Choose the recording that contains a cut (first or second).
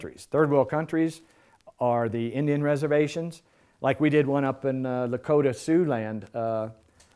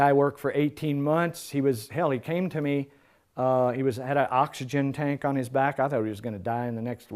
first